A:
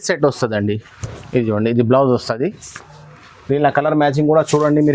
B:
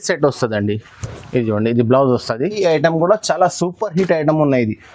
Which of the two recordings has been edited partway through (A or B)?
B